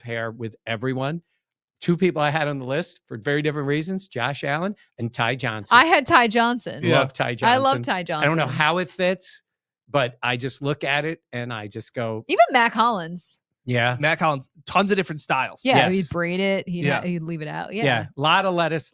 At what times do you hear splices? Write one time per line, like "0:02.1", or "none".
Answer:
none